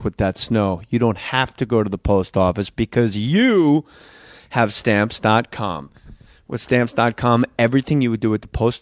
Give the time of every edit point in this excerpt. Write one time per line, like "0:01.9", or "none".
0:04.5